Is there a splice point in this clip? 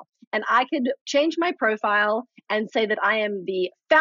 yes; 1 cut; at 1.0 s

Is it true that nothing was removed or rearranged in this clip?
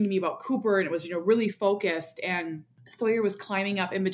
yes; 0 cuts

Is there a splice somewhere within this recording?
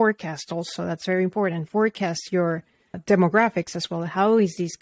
yes; 1 cut; at 3.0 s

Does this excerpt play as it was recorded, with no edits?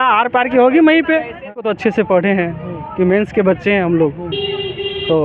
no; 1 cut; at 1.7 s

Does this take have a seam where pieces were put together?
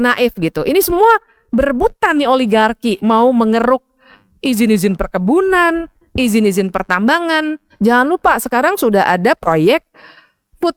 no; 0 cuts

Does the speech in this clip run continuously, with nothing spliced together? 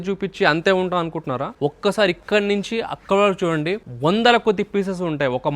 no; 2 cuts; at 1.5 s, 3.9 s

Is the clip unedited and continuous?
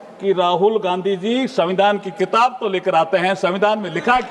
yes; 0 cuts

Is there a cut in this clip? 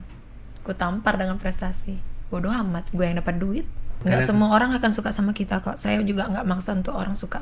yes; 1 cut; at 4.0 s

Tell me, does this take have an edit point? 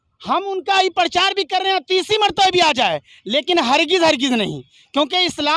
no; 0 cuts

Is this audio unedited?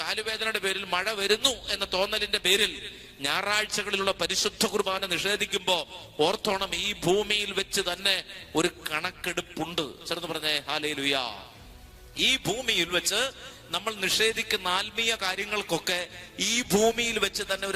yes; 0 cuts

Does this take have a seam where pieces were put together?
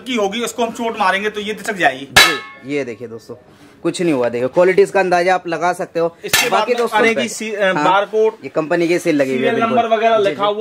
yes; 1 cut; at 6.9 s

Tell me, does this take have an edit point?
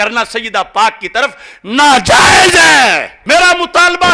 yes; 1 cut; at 3.1 s

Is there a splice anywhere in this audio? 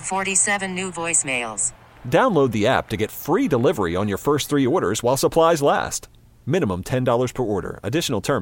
no; 0 cuts

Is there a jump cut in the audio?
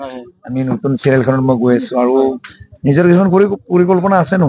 no; 0 cuts

